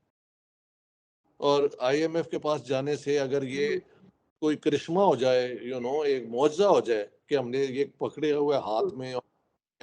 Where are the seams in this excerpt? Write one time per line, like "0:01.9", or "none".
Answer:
none